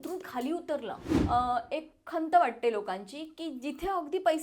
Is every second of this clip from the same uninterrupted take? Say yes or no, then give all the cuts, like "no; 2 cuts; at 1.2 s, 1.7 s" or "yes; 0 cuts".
no; 1 cut; at 1.1 s